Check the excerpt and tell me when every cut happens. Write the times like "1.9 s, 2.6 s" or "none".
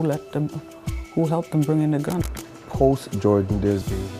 2.4 s